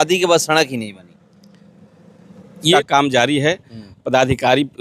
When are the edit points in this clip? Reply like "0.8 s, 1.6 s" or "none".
2.7 s